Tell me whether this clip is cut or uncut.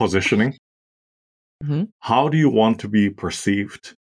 uncut